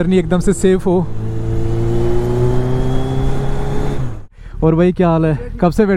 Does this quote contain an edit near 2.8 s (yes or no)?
no